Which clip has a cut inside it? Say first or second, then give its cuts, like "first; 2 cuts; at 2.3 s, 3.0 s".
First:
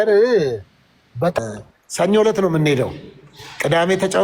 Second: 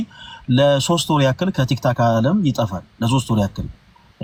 first; 1 cut; at 1.3 s